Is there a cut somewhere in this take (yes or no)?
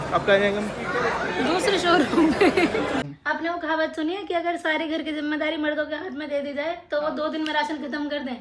yes